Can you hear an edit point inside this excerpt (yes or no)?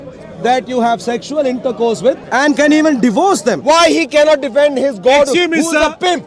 yes